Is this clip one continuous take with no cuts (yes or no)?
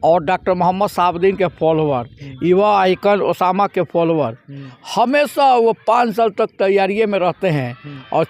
yes